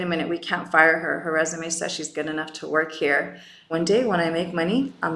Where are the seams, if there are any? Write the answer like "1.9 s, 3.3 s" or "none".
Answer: 3.7 s